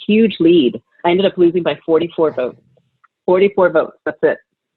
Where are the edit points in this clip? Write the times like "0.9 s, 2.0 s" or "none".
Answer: 1.0 s